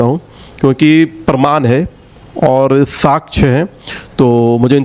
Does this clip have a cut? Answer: no; 0 cuts

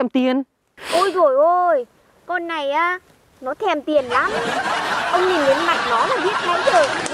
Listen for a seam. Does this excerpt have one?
no; 0 cuts

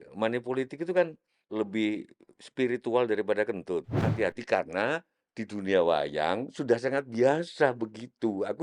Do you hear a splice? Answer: yes; 2 cuts; at 1.3 s, 4.0 s

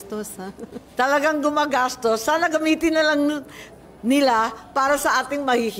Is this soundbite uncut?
yes; 0 cuts

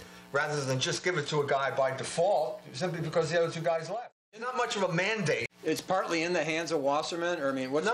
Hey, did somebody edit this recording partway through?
yes; 2 cuts; at 4.3 s, 5.5 s

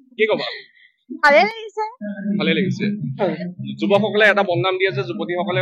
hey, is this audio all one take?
no; 1 cut; at 3.2 s

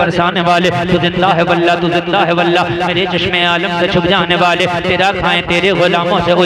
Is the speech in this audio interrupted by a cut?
no; 0 cuts

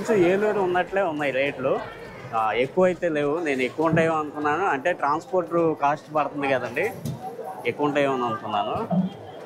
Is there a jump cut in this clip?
no; 0 cuts

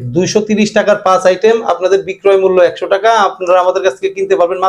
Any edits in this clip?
no; 0 cuts

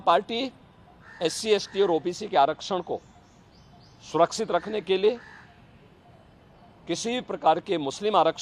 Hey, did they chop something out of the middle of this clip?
no; 0 cuts

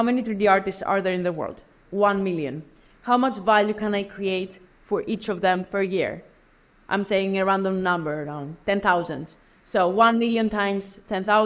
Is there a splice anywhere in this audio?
no; 0 cuts

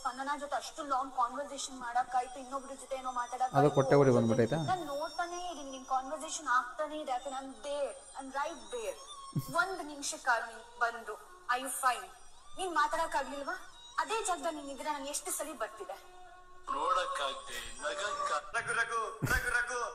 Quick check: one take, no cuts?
no; 1 cut; at 18.5 s

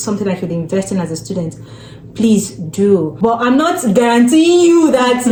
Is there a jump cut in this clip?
no; 0 cuts

